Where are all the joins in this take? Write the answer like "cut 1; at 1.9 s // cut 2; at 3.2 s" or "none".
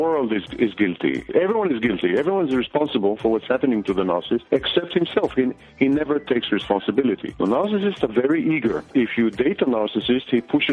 cut 1; at 1.3 s // cut 2; at 4.4 s // cut 3; at 7.3 s